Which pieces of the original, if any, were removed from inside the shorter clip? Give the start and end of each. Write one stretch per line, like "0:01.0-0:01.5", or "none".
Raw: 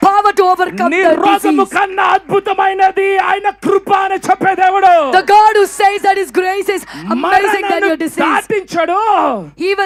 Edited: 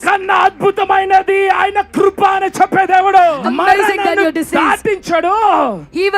0:05.1-0:07.0

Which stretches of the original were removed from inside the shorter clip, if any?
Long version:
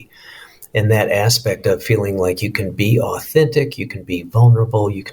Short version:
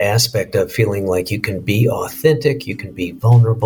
none

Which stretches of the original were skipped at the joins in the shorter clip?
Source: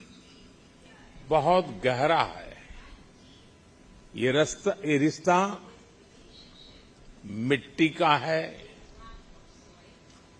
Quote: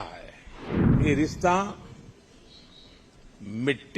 0:03.2-0:04.8

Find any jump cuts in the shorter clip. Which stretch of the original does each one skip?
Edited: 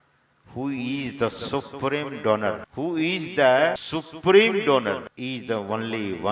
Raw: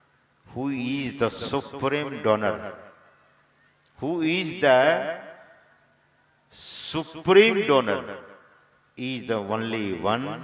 0:02.7-0:03.9
0:05.1-0:06.8
0:08.1-0:08.9

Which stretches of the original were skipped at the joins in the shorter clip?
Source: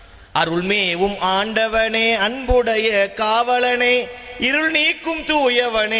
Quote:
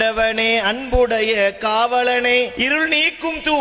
0:04.1-0:04.4

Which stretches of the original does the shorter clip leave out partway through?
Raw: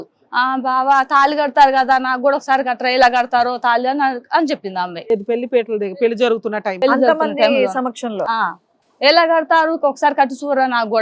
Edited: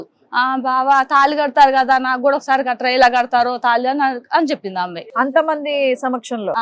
0:05.0-0:06.7

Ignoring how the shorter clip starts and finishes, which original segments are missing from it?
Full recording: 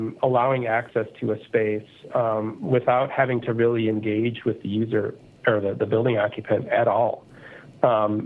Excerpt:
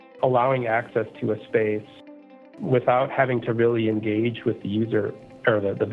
none

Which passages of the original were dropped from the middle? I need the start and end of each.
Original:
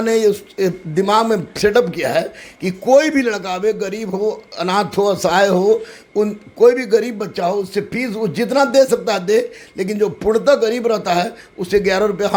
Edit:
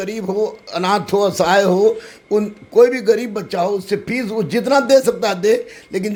none

